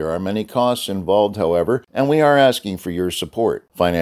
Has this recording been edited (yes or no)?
yes